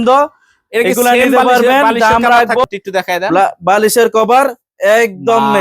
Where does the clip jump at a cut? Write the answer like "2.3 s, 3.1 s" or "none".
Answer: 2.6 s